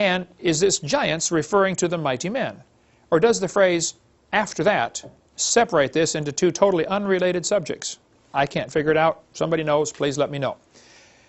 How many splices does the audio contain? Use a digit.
1